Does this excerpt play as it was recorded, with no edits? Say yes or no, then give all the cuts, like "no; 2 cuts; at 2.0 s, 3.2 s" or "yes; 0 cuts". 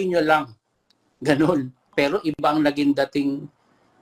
no; 1 cut; at 1.9 s